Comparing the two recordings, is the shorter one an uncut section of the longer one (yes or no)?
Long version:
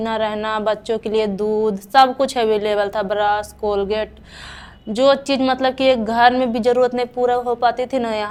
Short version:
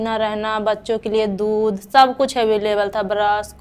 yes